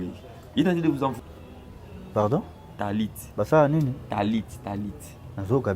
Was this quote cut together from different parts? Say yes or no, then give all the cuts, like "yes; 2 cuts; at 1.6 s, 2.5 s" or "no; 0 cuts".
yes; 1 cut; at 1.2 s